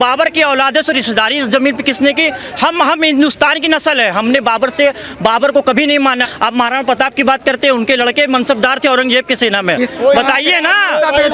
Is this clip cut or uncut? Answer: cut